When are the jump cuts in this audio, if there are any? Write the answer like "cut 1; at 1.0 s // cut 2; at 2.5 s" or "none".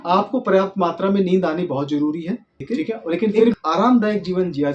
cut 1; at 3.5 s